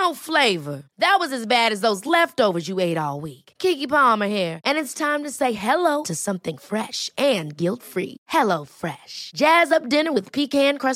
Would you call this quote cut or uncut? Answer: uncut